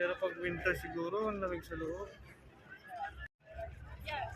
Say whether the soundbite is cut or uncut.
cut